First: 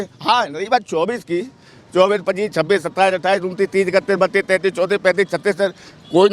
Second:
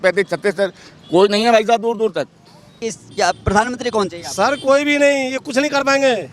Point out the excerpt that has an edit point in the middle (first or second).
second